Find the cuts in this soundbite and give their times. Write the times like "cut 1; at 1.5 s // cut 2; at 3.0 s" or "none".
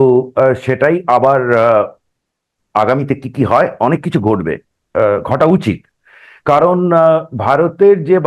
none